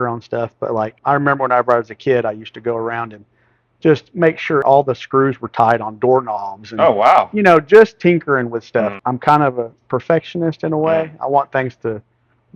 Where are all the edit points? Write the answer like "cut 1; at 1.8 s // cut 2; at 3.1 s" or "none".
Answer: cut 1; at 1.0 s // cut 2; at 4.6 s // cut 3; at 8.9 s